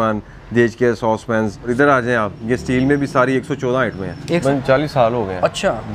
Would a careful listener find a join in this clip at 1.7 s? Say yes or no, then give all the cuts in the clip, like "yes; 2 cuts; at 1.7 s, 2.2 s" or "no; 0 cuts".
yes; 2 cuts; at 1.7 s, 4.4 s